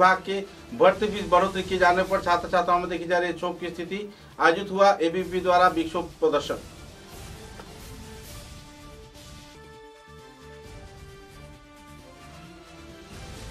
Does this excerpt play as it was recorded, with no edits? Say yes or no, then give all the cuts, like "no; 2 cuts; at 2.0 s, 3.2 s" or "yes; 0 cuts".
yes; 0 cuts